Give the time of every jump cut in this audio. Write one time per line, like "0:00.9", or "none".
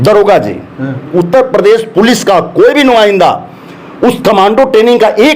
0:01.1